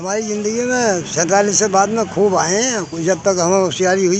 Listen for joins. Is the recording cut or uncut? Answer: uncut